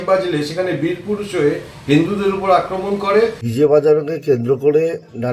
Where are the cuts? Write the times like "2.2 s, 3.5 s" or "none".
3.4 s